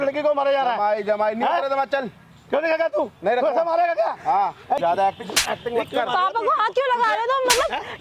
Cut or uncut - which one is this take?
cut